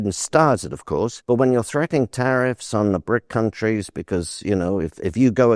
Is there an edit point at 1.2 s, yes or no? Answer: yes